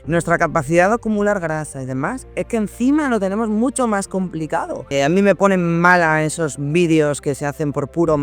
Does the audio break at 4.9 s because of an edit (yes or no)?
yes